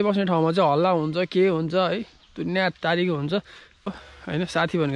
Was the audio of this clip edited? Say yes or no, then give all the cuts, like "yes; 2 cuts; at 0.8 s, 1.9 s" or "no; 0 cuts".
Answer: yes; 1 cut; at 3.9 s